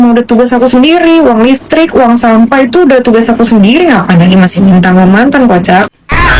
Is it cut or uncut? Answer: uncut